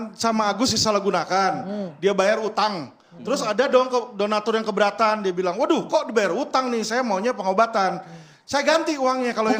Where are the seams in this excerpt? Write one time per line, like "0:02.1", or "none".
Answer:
none